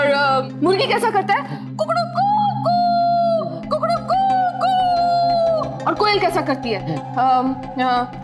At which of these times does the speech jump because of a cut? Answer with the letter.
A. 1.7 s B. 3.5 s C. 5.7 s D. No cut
C